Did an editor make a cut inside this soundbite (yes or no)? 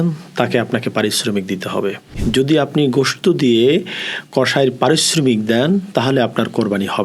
yes